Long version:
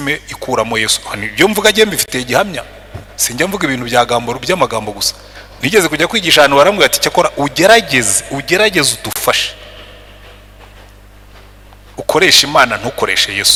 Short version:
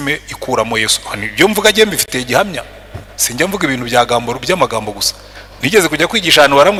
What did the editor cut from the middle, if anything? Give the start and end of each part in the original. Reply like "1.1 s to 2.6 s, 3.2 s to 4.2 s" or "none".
none